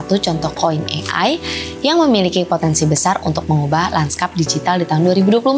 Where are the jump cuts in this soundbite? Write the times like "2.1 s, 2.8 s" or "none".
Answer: none